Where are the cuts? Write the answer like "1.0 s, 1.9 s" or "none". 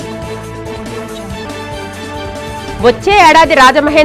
1.0 s